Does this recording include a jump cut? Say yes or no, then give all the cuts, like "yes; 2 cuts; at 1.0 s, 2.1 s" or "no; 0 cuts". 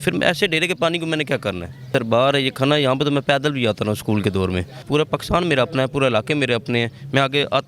yes; 2 cuts; at 1.9 s, 4.8 s